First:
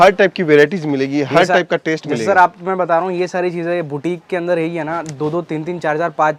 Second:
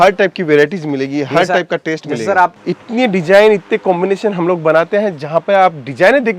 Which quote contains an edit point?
second; 1 cut; at 2.6 s

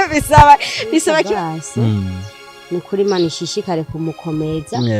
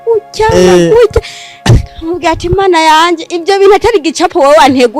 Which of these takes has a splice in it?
first; 1 cut; at 1.3 s

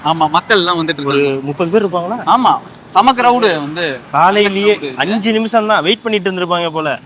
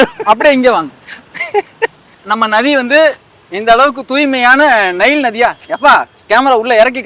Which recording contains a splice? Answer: second; 1 cut; at 2.1 s

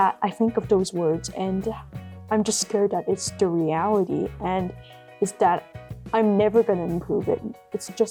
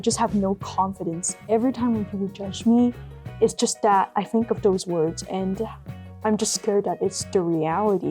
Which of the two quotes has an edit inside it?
second; 1 cut; at 1.3 s

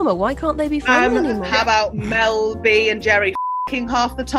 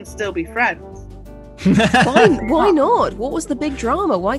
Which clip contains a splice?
first; 1 cut; at 1.5 s

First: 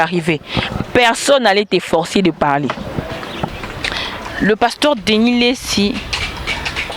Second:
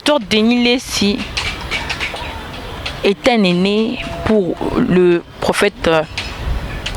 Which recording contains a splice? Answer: first; 1 cut; at 3.6 s

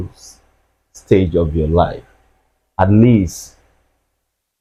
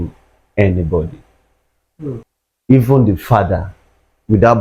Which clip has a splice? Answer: second; 1 cut; at 2.2 s

